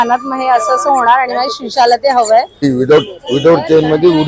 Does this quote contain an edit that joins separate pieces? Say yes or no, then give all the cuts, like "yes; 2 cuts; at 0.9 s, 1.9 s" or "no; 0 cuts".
yes; 1 cut; at 2.6 s